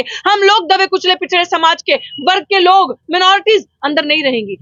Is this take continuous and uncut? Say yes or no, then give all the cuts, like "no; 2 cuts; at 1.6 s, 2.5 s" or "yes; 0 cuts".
yes; 0 cuts